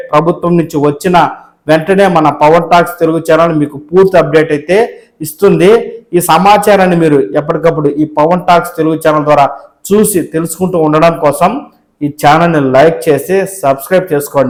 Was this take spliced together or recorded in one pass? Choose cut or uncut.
uncut